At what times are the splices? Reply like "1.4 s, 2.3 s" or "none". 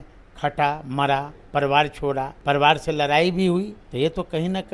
2.3 s, 3.8 s

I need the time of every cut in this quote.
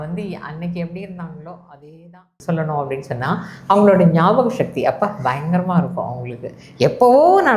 2.4 s

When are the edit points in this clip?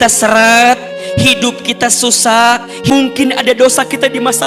2.9 s

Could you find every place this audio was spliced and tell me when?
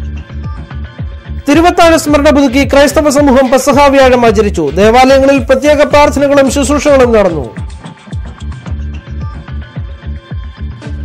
none

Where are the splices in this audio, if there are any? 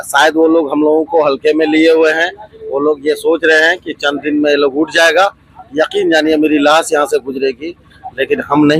none

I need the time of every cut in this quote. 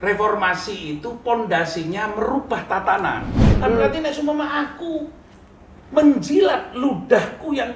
3.4 s

